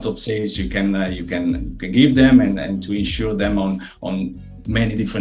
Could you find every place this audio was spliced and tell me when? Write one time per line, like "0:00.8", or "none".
none